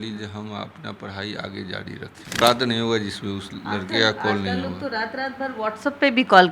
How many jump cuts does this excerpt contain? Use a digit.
1